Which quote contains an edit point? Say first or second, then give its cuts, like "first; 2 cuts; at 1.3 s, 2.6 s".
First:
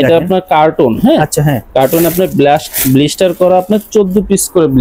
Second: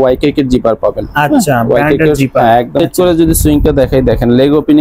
second; 1 cut; at 2.8 s